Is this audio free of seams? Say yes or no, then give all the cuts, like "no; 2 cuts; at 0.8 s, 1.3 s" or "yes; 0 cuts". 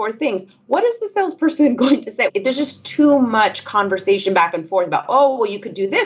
no; 1 cut; at 2.3 s